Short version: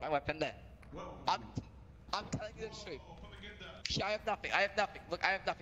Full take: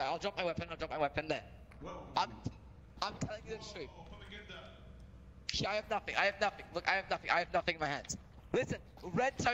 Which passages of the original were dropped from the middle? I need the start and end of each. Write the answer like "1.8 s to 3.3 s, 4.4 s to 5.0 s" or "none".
4.7 s to 5.4 s